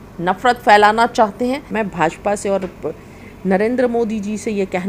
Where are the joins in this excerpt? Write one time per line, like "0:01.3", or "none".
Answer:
0:01.7